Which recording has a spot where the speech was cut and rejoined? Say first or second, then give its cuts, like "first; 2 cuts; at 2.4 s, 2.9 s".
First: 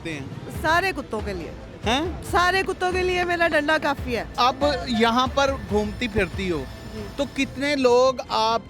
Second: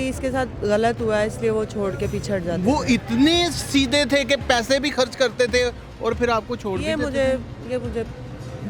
first; 1 cut; at 4.3 s